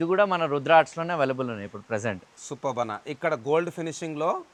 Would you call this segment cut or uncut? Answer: uncut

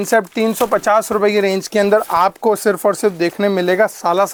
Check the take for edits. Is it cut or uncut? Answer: uncut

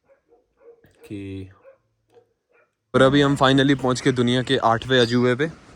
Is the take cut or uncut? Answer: cut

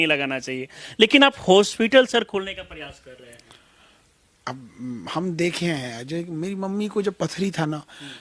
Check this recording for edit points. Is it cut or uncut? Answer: uncut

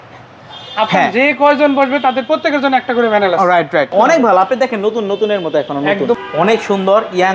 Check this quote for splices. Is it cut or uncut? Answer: cut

